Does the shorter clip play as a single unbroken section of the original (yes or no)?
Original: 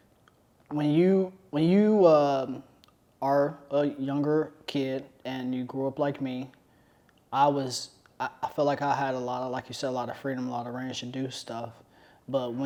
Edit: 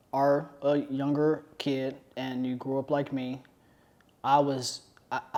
yes